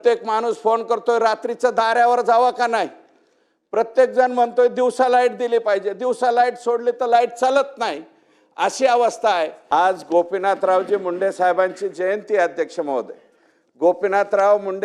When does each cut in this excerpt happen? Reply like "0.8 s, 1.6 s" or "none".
9.6 s